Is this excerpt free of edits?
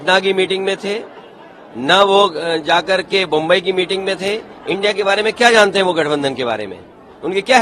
yes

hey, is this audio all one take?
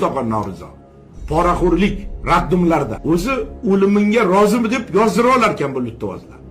no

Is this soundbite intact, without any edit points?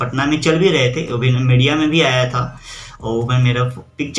yes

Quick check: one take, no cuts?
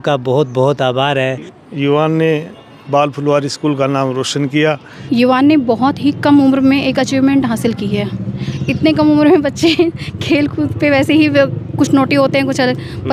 no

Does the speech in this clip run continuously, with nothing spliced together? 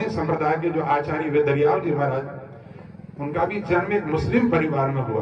yes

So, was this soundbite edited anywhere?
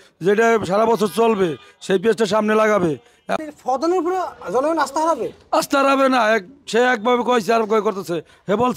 yes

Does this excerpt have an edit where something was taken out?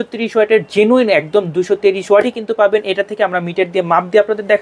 no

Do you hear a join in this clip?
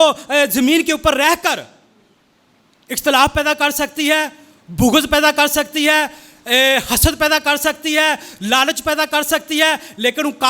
no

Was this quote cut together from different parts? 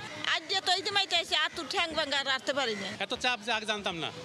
yes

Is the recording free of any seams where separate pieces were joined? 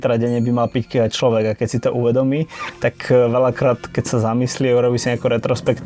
yes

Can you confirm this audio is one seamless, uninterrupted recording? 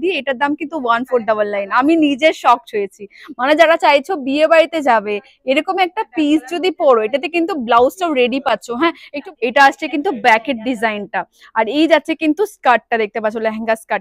no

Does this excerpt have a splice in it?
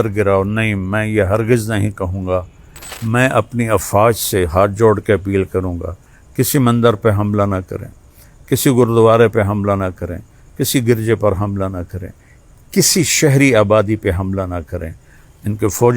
yes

